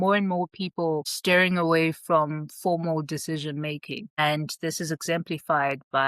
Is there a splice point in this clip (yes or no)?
no